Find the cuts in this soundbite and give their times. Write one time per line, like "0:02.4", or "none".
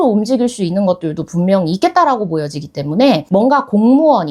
0:03.2